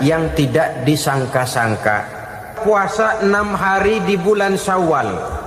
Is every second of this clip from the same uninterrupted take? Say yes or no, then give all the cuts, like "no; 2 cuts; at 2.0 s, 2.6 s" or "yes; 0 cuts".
no; 1 cut; at 2.6 s